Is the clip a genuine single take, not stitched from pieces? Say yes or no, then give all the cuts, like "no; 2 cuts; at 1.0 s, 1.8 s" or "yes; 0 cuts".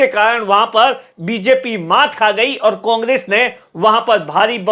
yes; 0 cuts